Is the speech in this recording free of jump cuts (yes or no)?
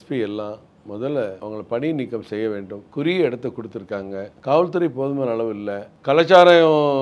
no